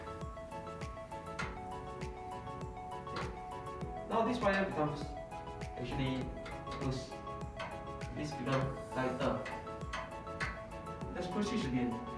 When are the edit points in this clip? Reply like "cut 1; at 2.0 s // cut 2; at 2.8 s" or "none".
none